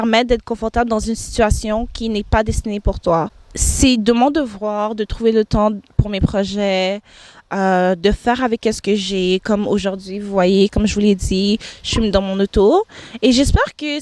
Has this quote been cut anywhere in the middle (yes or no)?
no